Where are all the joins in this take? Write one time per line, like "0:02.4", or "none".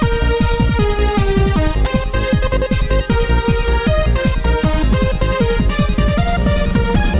0:05.5